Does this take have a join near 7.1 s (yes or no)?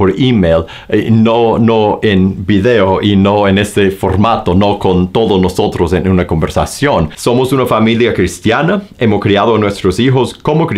yes